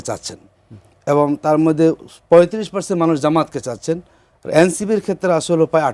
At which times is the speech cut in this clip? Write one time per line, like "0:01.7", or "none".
none